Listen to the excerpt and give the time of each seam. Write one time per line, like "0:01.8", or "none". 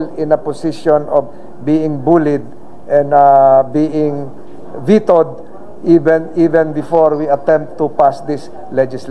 none